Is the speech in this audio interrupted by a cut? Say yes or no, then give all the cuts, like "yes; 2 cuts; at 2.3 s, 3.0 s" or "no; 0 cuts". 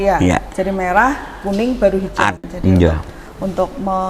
yes; 1 cut; at 2.4 s